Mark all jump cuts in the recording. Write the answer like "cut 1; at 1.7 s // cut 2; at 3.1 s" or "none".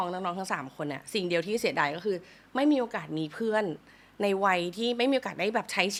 none